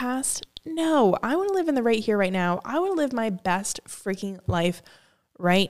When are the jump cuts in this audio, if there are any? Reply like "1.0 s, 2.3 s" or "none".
none